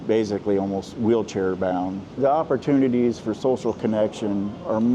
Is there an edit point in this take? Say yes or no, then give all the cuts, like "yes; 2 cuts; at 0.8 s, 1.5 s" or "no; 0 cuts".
yes; 1 cut; at 2.1 s